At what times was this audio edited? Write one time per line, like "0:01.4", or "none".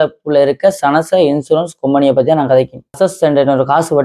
0:02.9